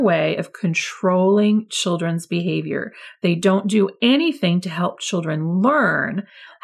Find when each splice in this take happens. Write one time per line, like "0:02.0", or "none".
none

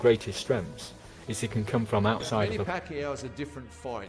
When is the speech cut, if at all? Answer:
0:02.6

